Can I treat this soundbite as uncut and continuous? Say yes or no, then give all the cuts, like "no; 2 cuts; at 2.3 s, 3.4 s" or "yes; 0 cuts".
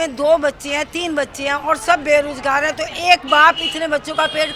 yes; 0 cuts